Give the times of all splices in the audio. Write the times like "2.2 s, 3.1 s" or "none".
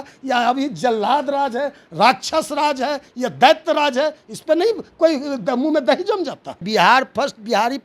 6.6 s